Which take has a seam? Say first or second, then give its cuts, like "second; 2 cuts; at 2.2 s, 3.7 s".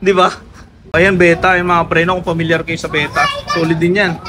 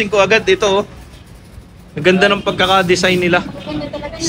first; 1 cut; at 0.9 s